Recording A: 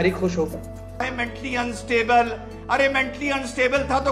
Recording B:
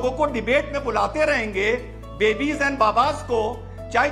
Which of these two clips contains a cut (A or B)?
A